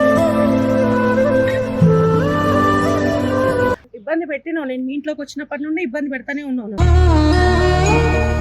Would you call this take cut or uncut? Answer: cut